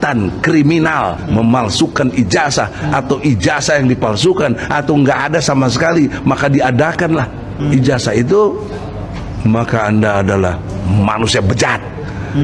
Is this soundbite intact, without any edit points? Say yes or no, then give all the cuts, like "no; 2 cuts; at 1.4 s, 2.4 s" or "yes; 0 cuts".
yes; 0 cuts